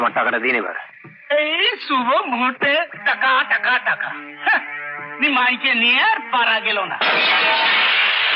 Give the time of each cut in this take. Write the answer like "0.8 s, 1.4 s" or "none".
none